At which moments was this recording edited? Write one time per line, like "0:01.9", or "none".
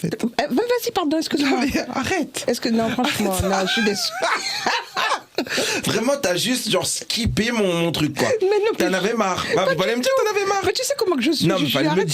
none

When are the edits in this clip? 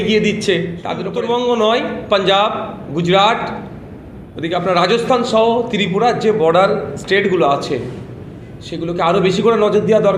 0:01.0

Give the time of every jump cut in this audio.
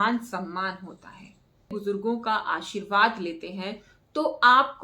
0:01.8

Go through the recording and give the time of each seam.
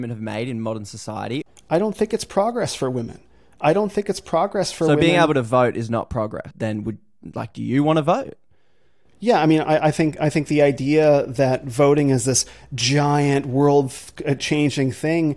0:01.5
0:06.5

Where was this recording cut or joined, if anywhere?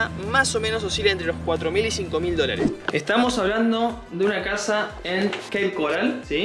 0:02.7

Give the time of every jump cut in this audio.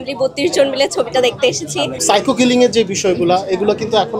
0:01.9

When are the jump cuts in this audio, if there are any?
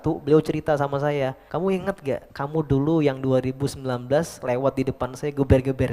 0:01.4
0:02.3

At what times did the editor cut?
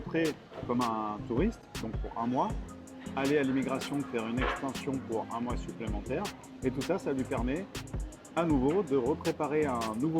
none

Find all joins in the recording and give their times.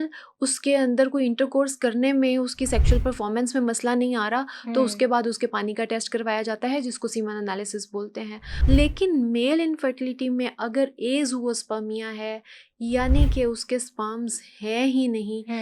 0:08.4

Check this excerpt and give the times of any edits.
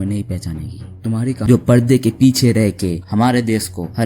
0:01.4

